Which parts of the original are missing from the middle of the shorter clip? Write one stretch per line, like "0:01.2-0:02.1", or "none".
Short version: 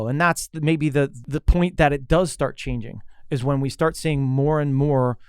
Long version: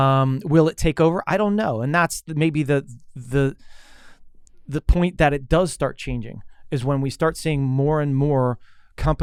0:02.9-0:04.6

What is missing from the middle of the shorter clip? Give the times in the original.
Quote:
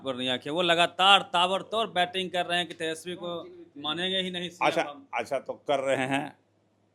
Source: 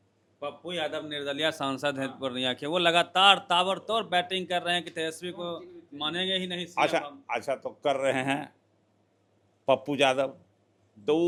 none

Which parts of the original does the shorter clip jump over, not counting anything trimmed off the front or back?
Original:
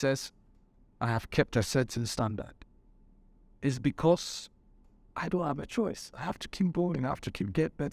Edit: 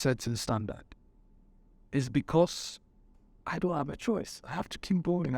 none

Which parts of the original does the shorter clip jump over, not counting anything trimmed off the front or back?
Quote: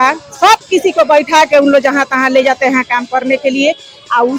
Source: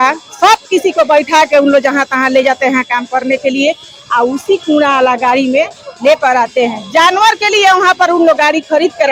none

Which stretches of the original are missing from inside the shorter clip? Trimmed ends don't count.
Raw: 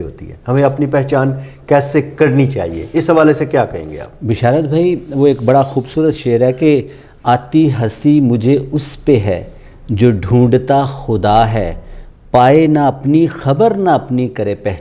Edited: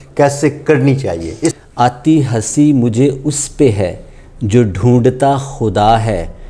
0:03.0-0:07.0

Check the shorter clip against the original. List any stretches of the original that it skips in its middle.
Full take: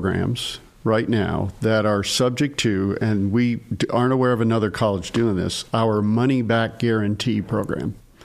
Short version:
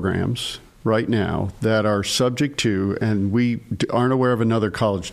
none

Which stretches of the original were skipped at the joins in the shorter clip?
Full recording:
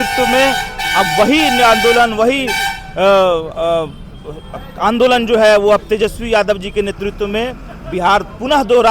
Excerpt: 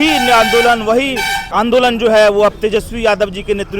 0:02.7-0:04.6

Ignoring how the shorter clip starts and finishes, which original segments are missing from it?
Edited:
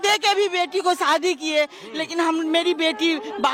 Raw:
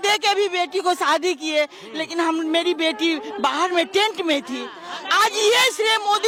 none

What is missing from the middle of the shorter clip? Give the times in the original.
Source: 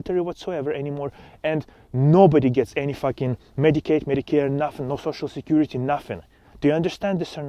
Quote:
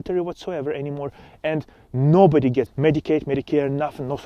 0:02.7-0:03.5

